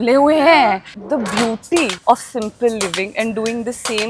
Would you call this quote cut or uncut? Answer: cut